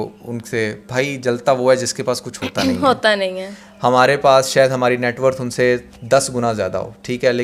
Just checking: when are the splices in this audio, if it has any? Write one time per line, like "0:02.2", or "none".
none